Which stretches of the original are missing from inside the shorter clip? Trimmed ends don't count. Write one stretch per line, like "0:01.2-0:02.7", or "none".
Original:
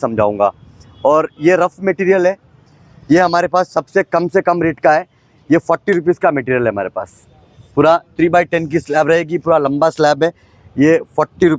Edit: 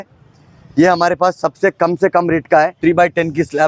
0:05.1-0:08.1